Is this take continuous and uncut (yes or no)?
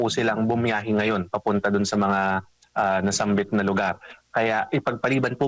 yes